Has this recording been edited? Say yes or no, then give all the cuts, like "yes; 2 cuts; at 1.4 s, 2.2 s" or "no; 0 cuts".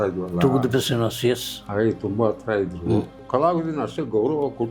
yes; 1 cut; at 3.2 s